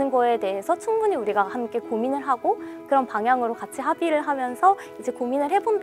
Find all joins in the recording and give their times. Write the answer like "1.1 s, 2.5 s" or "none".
2.7 s